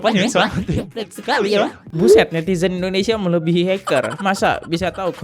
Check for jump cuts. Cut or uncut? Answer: cut